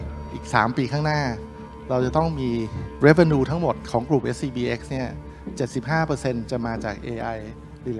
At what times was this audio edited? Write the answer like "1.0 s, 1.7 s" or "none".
2.8 s, 3.8 s